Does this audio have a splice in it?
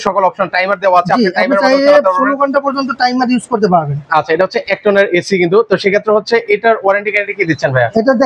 no; 0 cuts

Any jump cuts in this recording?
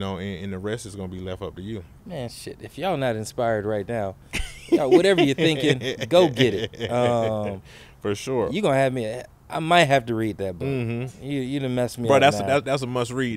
yes; 1 cut; at 1.9 s

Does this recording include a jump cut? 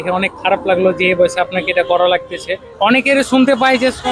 yes; 1 cut; at 2.7 s

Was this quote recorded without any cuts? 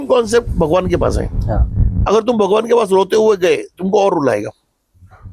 yes; 0 cuts

